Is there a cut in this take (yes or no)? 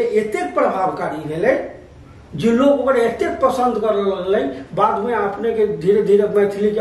no